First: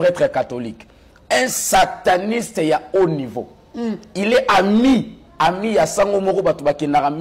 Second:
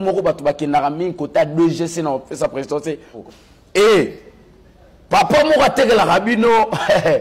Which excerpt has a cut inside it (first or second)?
second